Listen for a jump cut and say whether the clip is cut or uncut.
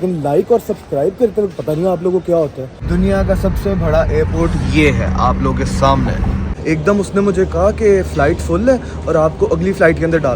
cut